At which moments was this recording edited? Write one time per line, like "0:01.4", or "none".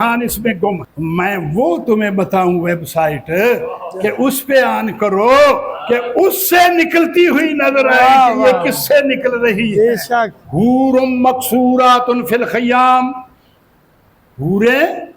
0:00.9
0:10.4